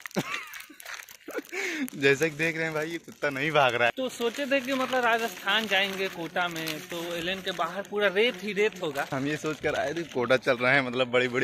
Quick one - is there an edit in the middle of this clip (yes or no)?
yes